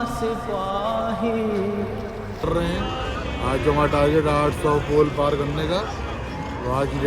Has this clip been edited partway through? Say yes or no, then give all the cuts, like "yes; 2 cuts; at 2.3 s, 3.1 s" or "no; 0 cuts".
yes; 1 cut; at 2.5 s